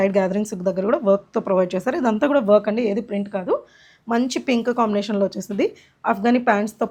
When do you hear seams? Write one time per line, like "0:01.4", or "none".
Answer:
none